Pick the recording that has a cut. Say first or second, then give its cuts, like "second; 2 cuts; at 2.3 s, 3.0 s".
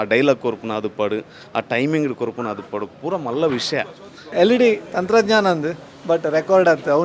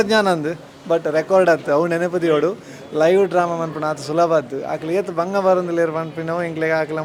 first; 1 cut; at 4.2 s